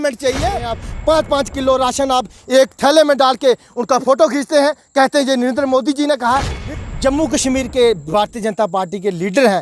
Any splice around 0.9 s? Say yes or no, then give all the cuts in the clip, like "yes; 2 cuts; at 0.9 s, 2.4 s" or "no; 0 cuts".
yes; 2 cuts; at 0.9 s, 6.6 s